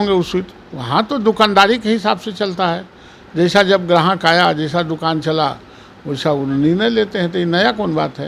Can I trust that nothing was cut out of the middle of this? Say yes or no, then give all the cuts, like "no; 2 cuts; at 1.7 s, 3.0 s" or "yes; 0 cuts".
yes; 0 cuts